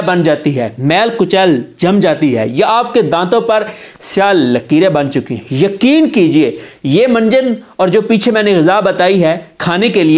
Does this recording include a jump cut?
no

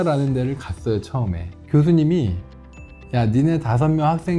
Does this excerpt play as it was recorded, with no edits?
no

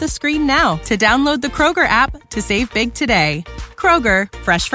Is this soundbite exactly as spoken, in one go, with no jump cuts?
yes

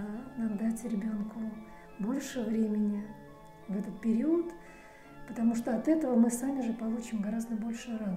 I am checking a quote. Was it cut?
no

